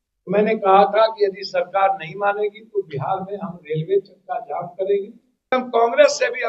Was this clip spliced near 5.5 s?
yes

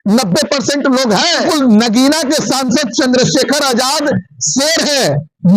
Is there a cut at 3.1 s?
no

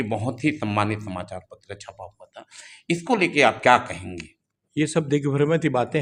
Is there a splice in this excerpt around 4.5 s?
no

